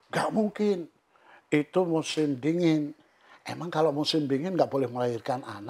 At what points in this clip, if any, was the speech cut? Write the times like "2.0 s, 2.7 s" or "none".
none